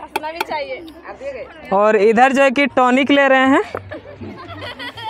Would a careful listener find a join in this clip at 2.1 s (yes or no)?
no